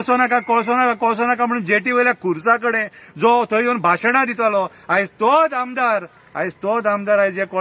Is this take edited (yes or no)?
no